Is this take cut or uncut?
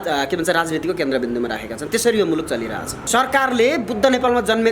cut